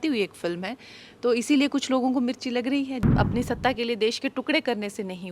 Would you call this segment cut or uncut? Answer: cut